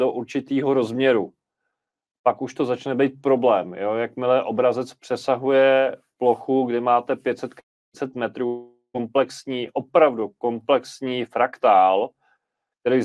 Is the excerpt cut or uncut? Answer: uncut